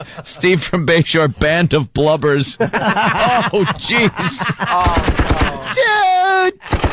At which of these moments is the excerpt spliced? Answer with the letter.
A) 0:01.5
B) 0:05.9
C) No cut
C